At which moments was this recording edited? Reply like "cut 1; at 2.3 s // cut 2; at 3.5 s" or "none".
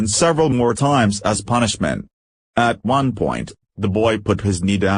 none